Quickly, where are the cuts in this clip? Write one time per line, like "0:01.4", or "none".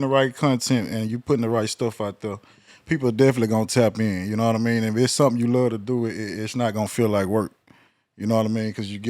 none